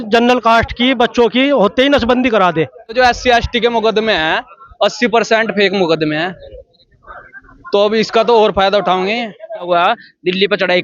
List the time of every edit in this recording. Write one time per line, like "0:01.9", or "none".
0:02.9
0:09.7

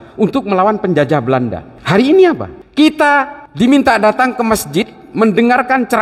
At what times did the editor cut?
0:01.8

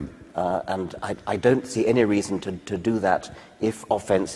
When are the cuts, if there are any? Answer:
0:03.2

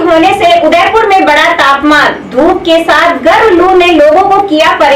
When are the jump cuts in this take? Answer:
none

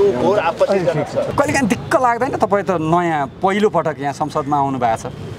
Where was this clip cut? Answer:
0:01.3

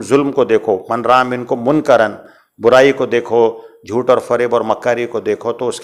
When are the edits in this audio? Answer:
none

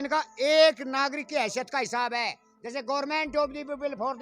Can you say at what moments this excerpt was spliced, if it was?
none

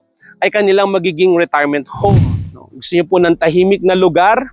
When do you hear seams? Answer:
0:02.1

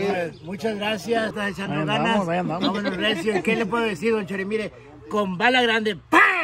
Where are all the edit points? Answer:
0:01.3

